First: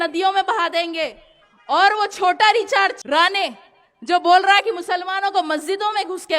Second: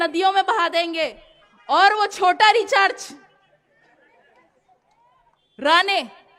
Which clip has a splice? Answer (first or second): first